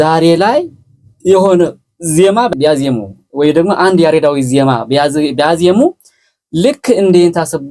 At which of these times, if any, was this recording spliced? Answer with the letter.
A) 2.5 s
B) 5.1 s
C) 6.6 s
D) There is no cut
A